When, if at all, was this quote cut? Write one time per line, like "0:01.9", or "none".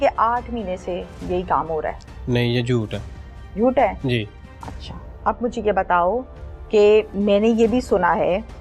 none